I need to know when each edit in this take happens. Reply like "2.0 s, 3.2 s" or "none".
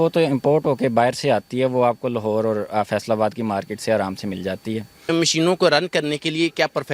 5.1 s